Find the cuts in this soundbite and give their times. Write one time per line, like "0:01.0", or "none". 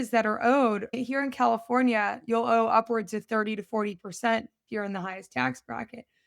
0:00.9